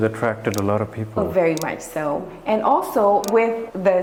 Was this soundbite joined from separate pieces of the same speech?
no; 0 cuts

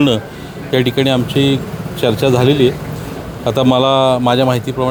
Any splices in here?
no; 0 cuts

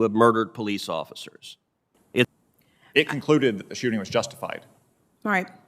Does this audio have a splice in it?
yes; 1 cut; at 2.3 s

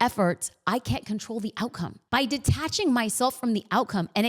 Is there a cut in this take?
yes; 1 cut; at 2.0 s

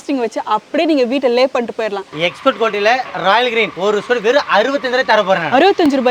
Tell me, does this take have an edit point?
yes; 2 cuts; at 2.1 s, 3.7 s

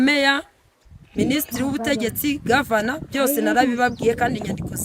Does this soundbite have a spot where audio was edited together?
no; 0 cuts

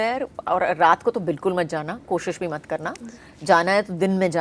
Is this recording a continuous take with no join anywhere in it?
yes; 0 cuts

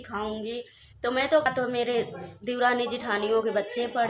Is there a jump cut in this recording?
yes; 1 cut; at 1.5 s

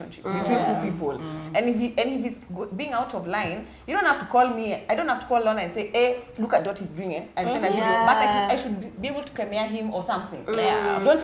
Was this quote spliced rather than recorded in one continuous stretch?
no; 0 cuts

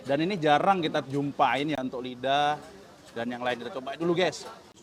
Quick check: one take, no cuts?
yes; 0 cuts

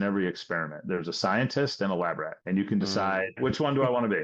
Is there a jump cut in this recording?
yes; 2 cuts; at 2.3 s, 3.3 s

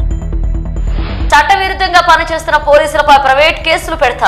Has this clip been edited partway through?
yes; 1 cut; at 1.3 s

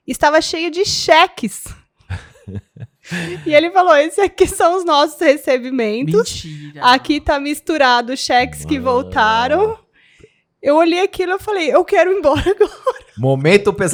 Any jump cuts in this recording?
no; 0 cuts

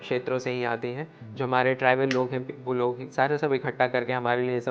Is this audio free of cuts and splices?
yes; 0 cuts

